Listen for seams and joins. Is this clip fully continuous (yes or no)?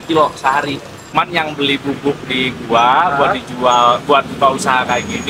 no